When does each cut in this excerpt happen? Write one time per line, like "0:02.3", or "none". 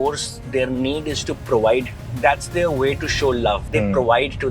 0:02.0
0:03.6